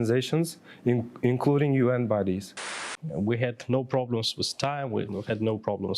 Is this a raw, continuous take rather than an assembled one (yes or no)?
no